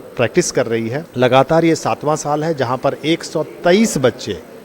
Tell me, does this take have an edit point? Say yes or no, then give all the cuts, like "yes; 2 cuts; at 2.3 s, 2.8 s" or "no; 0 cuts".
yes; 1 cut; at 1.0 s